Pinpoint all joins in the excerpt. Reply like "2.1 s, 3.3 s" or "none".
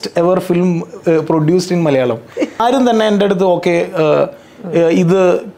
2.6 s